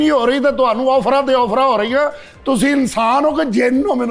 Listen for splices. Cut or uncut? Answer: uncut